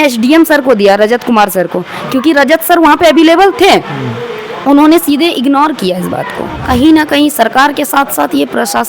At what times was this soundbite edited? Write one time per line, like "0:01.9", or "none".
0:06.6